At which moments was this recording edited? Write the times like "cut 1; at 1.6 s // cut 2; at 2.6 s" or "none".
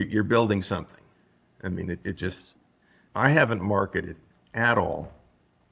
none